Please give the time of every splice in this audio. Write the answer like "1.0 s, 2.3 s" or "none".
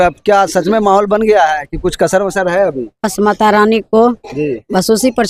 none